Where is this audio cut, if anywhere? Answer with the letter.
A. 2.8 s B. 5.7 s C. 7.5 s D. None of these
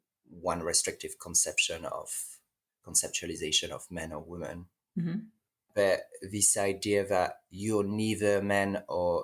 B